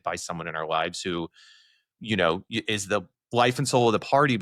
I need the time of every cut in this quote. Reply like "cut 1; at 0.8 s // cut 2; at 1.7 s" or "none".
none